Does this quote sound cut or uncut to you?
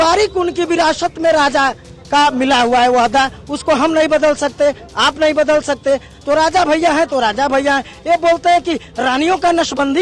uncut